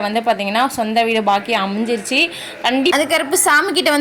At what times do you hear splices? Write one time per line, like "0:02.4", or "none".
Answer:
0:02.9